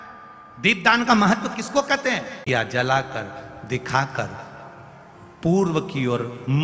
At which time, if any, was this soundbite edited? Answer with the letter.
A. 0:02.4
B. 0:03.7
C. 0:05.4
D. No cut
A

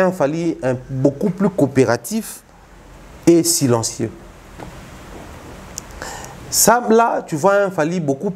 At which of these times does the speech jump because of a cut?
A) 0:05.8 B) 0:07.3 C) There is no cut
C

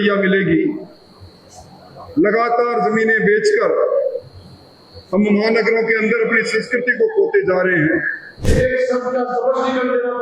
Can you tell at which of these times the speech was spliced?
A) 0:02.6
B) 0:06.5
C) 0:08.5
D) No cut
C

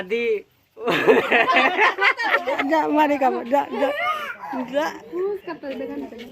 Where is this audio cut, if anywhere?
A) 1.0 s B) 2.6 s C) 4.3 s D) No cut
B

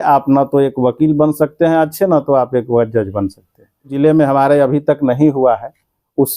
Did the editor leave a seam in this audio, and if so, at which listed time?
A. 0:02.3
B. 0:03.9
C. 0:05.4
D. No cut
B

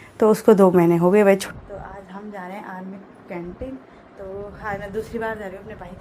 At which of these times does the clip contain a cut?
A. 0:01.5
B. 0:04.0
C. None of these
A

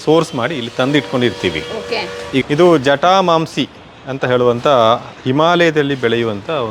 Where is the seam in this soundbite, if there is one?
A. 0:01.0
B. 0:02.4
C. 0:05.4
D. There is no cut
B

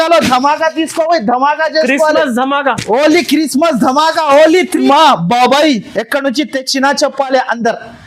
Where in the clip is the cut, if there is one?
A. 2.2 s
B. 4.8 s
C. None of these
B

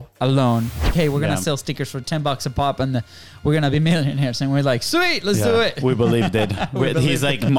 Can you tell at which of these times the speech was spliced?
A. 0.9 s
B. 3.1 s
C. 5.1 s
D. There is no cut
A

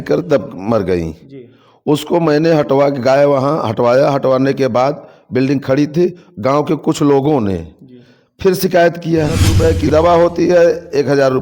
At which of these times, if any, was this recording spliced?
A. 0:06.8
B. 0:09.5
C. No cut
B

